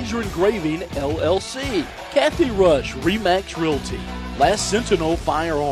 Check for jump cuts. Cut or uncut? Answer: cut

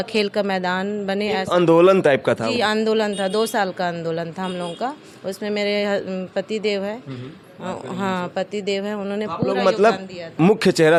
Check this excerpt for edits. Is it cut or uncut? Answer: uncut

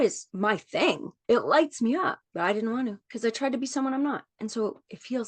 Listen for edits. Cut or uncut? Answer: cut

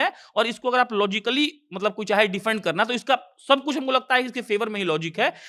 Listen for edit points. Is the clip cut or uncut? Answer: uncut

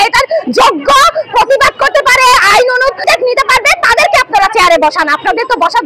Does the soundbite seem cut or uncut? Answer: uncut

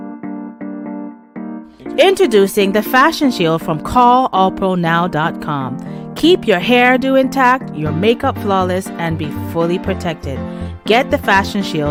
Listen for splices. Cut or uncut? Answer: uncut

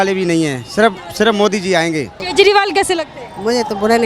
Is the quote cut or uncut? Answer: cut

